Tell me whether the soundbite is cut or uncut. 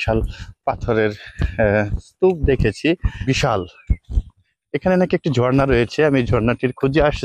cut